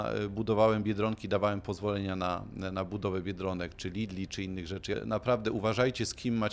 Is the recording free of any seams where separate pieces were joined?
no; 1 cut; at 5.0 s

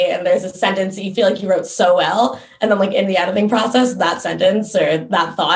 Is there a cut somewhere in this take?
no; 0 cuts

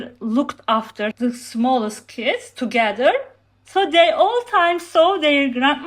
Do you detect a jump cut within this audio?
yes; 1 cut; at 1.1 s

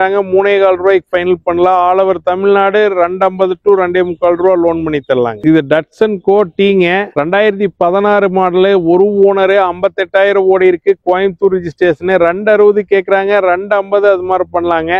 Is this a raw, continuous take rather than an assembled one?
yes; 0 cuts

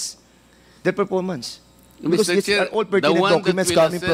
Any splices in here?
no; 0 cuts

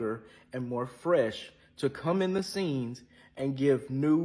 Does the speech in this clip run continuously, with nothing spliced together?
yes; 0 cuts

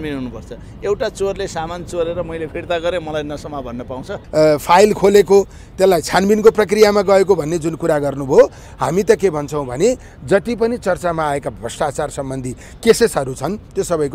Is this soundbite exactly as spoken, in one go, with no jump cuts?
no; 1 cut; at 4.2 s

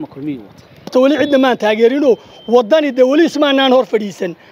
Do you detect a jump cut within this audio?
yes; 1 cut; at 0.9 s

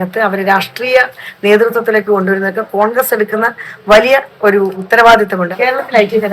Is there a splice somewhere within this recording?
yes; 2 cuts; at 4.8 s, 5.5 s

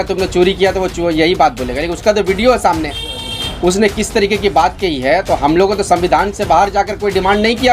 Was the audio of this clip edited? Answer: no; 0 cuts

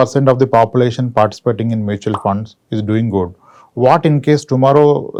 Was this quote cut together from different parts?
no; 0 cuts

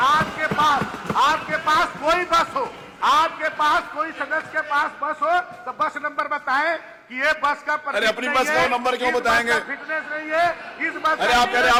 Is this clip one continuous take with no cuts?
yes; 0 cuts

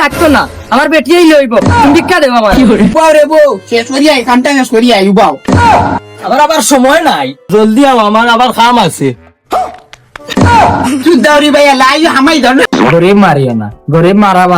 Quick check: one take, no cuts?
no; 2 cuts; at 3.0 s, 12.7 s

